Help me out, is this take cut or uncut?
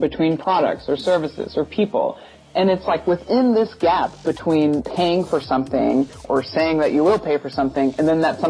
cut